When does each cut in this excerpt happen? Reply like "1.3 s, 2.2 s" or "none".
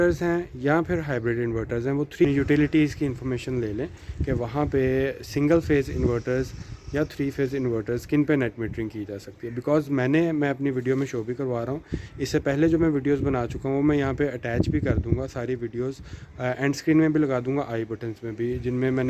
2.2 s